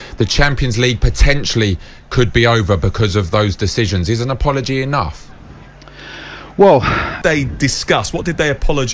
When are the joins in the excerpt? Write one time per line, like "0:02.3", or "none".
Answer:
0:07.2